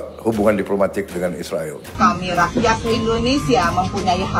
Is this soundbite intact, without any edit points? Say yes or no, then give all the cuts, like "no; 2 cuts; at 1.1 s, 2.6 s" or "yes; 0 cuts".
no; 1 cut; at 2.0 s